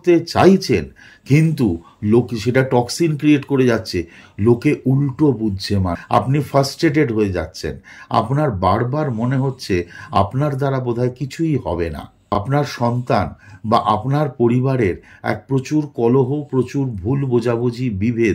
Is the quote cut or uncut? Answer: cut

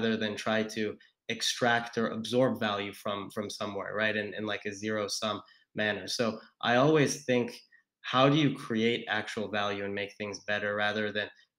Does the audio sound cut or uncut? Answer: uncut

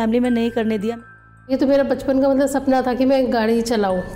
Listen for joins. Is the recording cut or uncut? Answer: cut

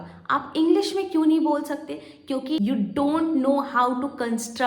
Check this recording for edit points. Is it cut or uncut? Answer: cut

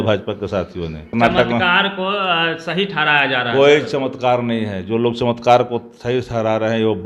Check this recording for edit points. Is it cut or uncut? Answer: cut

